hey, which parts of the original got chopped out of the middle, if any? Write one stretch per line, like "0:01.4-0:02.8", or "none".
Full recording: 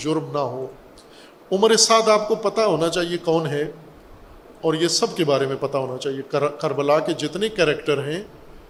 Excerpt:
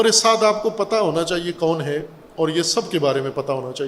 0:03.8-0:04.4